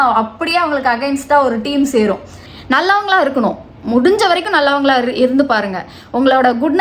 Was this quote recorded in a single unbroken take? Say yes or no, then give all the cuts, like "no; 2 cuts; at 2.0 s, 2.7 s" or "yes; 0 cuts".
no; 1 cut; at 2.4 s